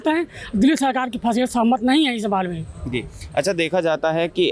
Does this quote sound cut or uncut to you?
uncut